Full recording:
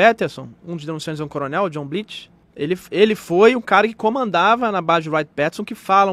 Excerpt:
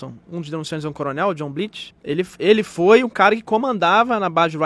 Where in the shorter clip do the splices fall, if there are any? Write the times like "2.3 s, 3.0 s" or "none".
1.9 s